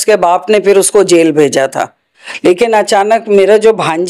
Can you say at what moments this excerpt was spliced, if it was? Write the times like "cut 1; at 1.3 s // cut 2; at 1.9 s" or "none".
cut 1; at 2.2 s